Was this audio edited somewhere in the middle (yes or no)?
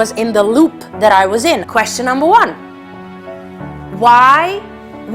yes